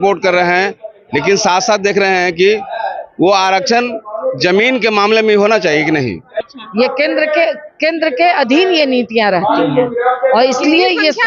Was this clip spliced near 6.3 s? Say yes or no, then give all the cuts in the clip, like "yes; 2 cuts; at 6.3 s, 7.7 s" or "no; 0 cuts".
yes; 1 cut; at 6.3 s